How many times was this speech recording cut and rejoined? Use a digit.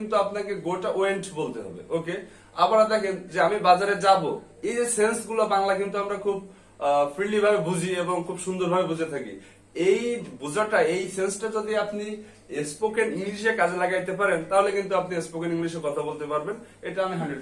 0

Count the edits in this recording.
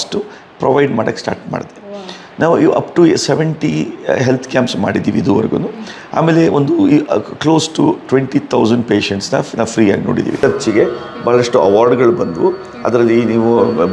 1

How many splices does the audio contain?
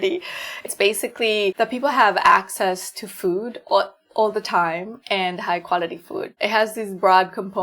2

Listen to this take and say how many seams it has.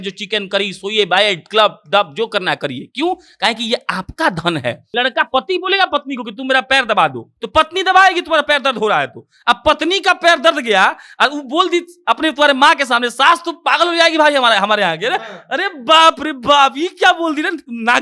1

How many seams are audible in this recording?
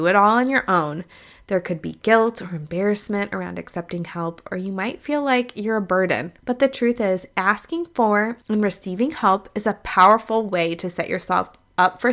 2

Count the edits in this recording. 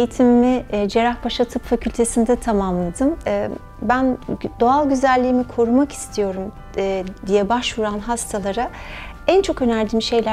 1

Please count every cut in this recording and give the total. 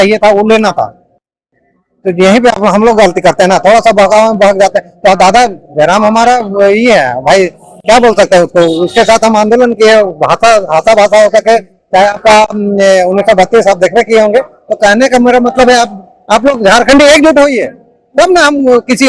0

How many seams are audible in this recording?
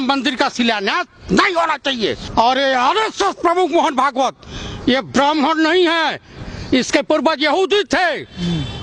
1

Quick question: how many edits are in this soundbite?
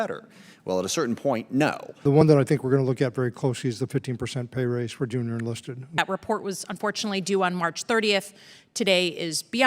2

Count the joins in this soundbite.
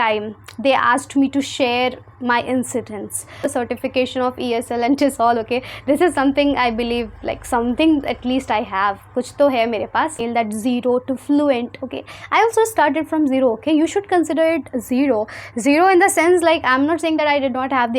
2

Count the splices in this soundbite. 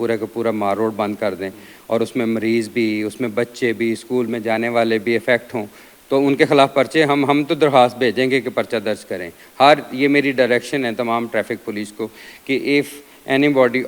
0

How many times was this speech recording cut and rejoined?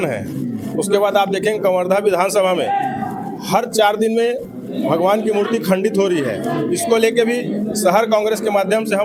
0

